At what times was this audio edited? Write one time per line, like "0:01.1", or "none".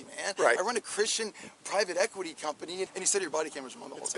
0:02.9